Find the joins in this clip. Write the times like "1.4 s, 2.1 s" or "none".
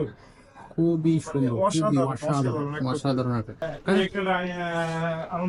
4.0 s

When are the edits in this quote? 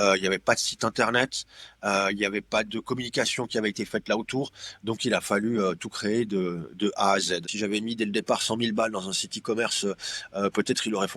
7.5 s

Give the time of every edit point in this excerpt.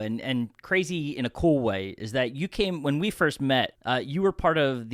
3.8 s

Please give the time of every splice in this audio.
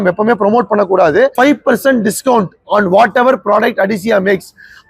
1.3 s

